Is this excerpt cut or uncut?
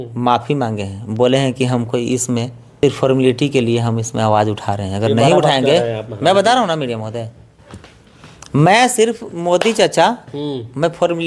cut